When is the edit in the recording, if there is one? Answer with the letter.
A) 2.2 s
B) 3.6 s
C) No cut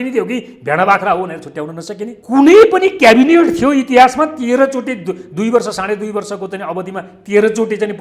A